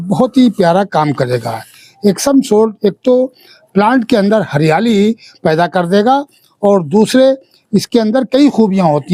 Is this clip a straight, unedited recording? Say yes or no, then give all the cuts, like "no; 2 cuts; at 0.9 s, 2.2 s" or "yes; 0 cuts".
yes; 0 cuts